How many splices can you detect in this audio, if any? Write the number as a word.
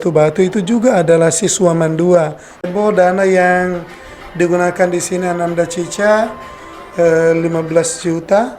one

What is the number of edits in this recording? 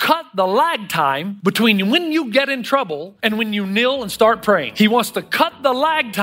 three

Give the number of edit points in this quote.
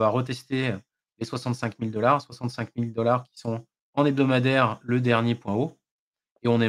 one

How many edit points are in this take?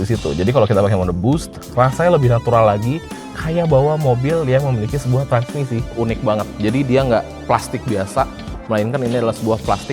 one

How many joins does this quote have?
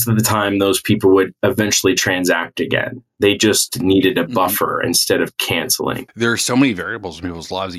one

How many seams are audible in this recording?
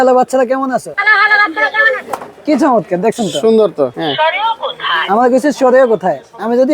two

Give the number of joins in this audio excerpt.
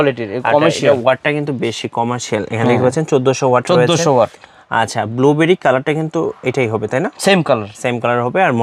zero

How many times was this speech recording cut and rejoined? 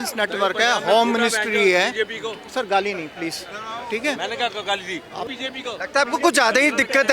one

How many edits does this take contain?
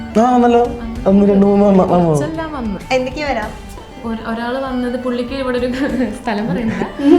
two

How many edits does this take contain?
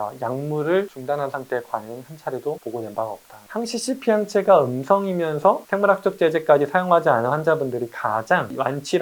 one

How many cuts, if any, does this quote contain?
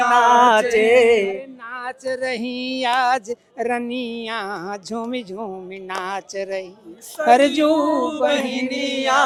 zero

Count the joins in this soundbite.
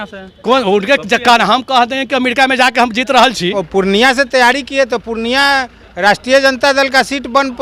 one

